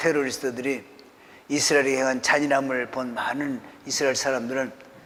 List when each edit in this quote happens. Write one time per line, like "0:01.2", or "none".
none